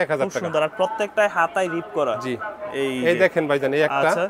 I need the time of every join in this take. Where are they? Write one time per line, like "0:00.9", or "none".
none